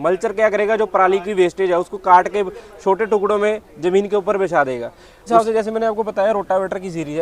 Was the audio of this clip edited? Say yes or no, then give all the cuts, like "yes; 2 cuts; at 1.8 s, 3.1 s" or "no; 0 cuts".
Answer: yes; 1 cut; at 5.2 s